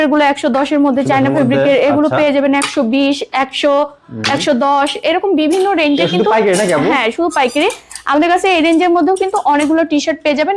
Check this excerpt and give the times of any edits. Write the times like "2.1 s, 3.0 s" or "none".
none